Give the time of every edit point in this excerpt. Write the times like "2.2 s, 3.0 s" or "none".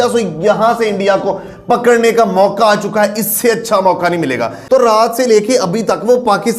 4.5 s